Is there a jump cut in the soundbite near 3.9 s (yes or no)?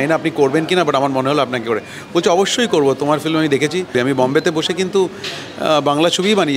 yes